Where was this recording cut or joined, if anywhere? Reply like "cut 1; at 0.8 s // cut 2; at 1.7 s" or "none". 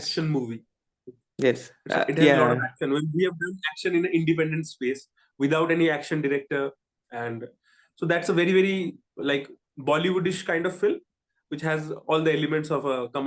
none